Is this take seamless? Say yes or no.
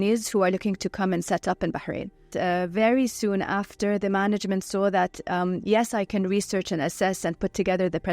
yes